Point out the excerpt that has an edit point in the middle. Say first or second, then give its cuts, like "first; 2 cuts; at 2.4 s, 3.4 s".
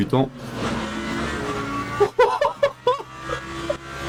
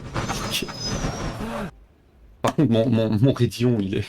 second; 1 cut; at 1.7 s